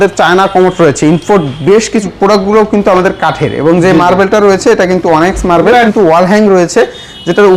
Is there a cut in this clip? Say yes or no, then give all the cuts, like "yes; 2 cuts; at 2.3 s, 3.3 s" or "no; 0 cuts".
yes; 2 cuts; at 2.1 s, 5.9 s